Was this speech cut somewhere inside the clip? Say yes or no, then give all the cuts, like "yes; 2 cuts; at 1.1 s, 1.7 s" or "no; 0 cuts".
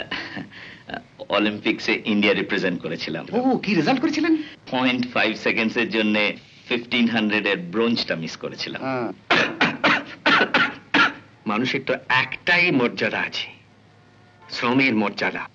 yes; 2 cuts; at 4.6 s, 11.2 s